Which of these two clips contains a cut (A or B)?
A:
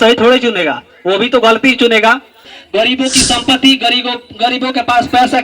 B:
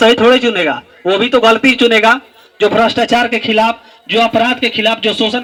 A